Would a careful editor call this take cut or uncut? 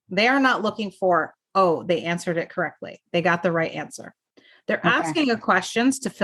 uncut